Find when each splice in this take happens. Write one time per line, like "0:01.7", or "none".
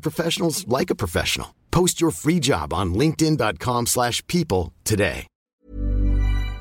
0:05.6